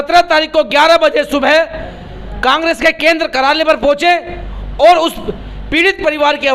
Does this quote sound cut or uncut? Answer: uncut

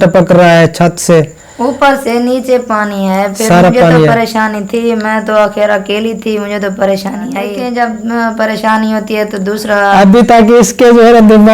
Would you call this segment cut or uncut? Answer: cut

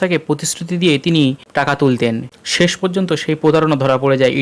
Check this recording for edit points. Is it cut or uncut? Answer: cut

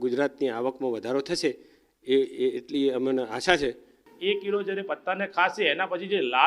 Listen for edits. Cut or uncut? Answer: cut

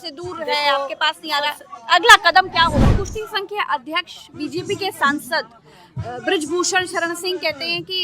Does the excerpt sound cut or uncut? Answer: cut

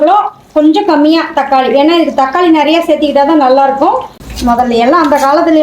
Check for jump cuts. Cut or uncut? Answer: cut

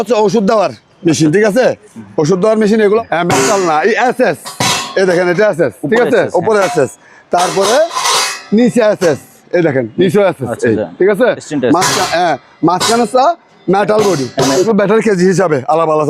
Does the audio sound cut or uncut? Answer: cut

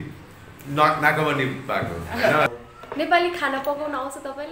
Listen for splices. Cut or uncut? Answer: cut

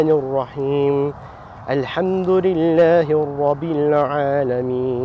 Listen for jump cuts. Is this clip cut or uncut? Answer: uncut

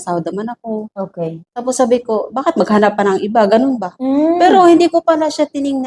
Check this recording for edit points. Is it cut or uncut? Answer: uncut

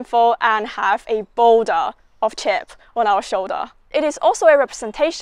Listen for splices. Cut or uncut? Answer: cut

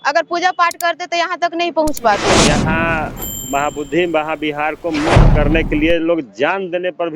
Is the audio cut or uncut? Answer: cut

